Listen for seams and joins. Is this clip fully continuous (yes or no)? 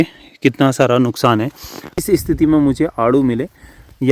no